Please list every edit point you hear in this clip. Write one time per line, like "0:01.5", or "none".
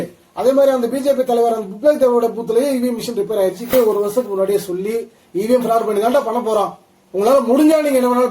0:03.7